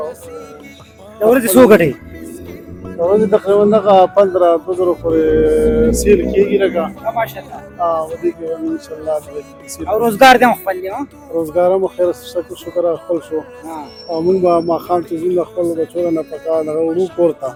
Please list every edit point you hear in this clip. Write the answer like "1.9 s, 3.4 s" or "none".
none